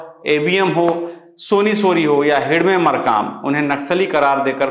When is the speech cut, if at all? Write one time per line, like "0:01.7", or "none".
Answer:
none